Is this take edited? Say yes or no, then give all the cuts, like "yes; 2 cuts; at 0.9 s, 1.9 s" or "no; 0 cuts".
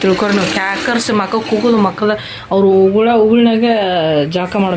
no; 0 cuts